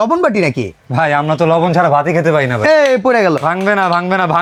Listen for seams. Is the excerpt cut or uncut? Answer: uncut